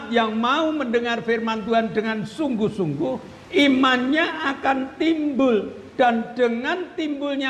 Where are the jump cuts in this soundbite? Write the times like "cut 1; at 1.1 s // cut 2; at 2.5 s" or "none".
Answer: none